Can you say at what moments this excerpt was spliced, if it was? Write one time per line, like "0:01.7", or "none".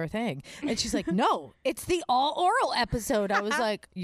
none